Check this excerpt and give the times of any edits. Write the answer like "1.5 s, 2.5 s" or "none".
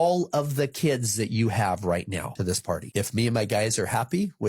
2.6 s